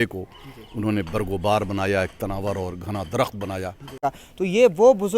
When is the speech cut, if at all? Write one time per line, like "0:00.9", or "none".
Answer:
0:04.0